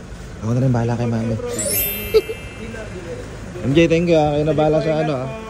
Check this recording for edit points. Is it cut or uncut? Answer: uncut